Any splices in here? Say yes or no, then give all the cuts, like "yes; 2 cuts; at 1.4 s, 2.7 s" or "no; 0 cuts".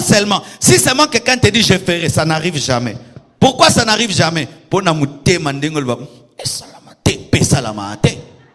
no; 0 cuts